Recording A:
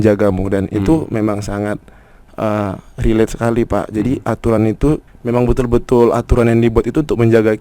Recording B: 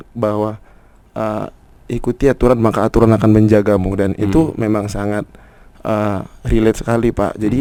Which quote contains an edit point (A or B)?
A